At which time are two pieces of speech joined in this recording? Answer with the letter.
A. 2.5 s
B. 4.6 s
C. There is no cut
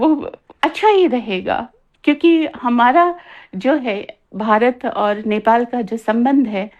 C